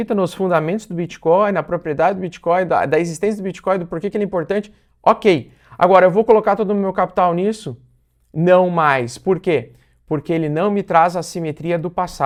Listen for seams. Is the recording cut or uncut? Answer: uncut